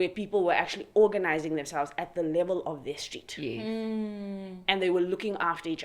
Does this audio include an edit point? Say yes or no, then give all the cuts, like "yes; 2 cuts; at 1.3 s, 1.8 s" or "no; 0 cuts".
no; 0 cuts